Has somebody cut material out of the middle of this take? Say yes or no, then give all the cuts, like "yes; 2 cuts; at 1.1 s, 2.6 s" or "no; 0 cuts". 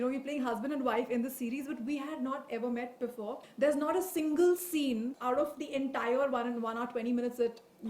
yes; 2 cuts; at 3.4 s, 5.1 s